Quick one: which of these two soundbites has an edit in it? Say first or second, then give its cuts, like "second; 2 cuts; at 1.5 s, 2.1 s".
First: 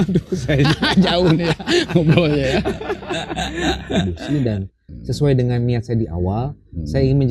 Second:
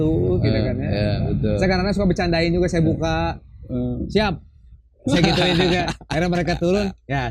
first; 1 cut; at 4.1 s